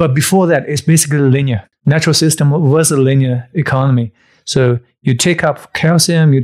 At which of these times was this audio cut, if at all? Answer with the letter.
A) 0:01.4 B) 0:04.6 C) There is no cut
C